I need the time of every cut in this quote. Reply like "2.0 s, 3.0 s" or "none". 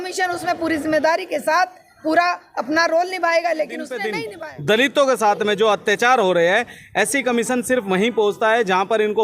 4.2 s